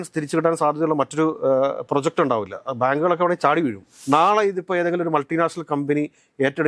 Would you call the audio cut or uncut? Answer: cut